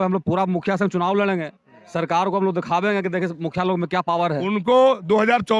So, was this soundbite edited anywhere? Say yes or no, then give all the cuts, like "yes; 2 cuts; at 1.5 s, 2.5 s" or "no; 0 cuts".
yes; 1 cut; at 4.4 s